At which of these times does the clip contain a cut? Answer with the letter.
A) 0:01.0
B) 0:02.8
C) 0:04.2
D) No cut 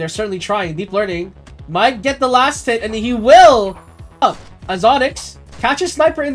C